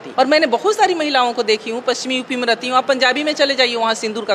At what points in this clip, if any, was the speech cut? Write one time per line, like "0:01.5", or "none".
none

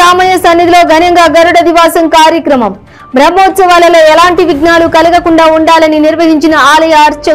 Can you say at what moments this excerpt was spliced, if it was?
none

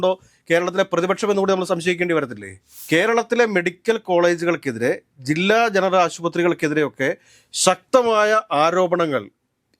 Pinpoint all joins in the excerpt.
0:02.8

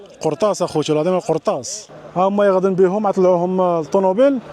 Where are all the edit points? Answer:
0:01.9

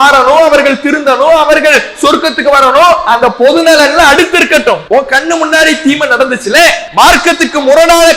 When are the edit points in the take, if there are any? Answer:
0:04.8
0:06.8

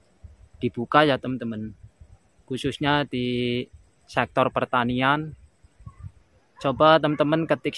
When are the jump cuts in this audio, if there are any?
0:06.4

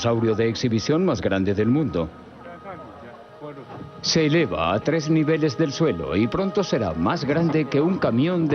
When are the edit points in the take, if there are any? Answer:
0:01.6

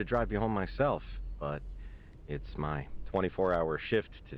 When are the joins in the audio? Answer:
none

